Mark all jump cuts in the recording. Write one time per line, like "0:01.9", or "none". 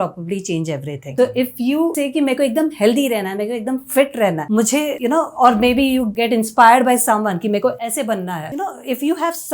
0:01.0
0:01.9
0:04.7
0:06.1
0:08.4

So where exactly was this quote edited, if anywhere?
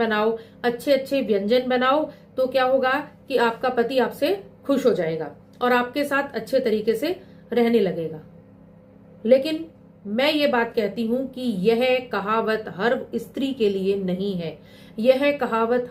none

